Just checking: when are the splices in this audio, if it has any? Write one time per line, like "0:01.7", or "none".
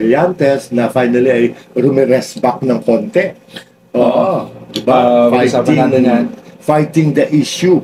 none